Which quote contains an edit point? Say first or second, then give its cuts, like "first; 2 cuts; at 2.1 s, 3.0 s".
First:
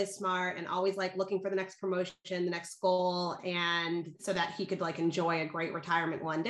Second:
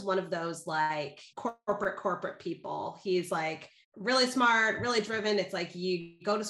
second; 1 cut; at 1.2 s